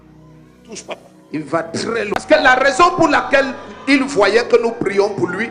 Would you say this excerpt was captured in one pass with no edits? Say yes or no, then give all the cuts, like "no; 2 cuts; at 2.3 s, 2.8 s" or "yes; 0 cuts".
no; 1 cut; at 2.1 s